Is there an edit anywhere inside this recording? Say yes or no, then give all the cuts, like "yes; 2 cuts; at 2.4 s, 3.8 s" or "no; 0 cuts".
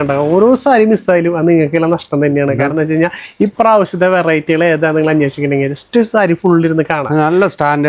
no; 0 cuts